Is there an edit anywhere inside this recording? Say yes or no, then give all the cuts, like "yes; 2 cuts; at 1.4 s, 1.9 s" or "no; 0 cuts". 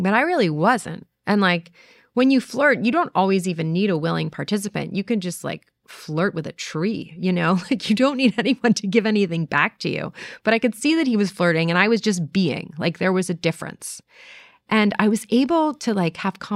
no; 0 cuts